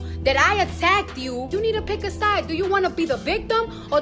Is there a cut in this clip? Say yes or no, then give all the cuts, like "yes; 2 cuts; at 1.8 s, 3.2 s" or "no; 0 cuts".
yes; 1 cut; at 1.5 s